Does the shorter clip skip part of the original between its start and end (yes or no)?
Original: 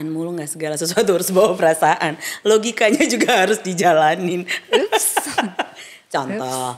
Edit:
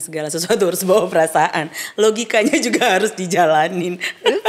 no